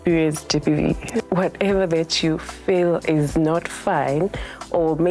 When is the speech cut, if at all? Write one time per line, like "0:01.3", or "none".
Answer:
0:01.2